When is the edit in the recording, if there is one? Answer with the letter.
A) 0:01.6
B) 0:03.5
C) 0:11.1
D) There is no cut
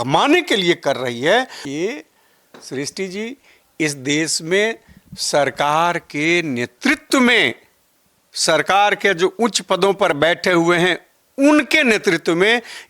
A